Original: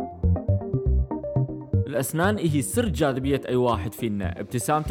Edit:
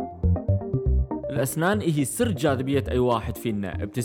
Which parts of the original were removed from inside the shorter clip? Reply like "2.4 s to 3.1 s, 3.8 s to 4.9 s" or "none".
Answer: 1.3 s to 1.9 s